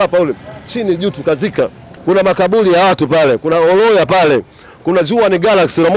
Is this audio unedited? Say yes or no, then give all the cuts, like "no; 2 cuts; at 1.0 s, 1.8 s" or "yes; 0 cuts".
no; 1 cut; at 1.9 s